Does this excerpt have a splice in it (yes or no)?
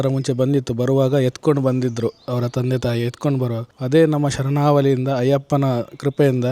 yes